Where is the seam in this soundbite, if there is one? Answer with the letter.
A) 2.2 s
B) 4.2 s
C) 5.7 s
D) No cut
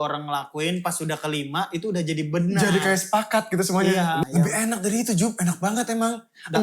B